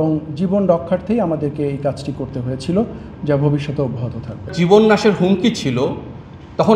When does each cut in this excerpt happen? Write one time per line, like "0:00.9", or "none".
0:04.5